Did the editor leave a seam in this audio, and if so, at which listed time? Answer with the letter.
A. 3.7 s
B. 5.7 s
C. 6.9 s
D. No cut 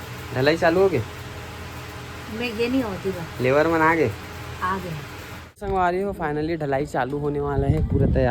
B